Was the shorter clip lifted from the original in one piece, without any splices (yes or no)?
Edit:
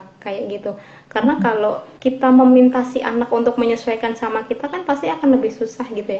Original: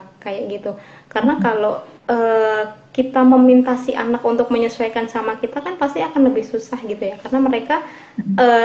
no